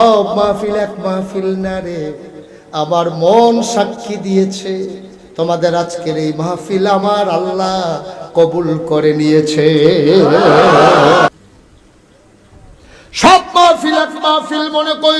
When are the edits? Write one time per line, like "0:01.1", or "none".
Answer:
0:11.3